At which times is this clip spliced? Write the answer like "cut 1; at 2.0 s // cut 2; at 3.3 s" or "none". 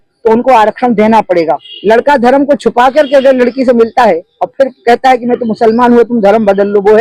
cut 1; at 1.6 s